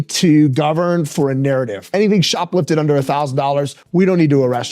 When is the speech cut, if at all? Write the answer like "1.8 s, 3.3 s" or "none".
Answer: 1.9 s